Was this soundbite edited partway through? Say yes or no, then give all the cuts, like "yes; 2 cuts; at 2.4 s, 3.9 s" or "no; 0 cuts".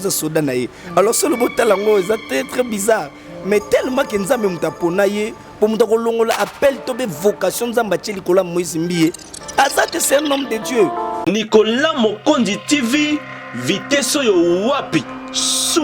yes; 1 cut; at 11.2 s